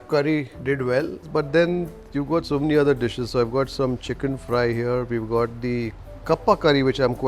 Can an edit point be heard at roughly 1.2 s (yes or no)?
yes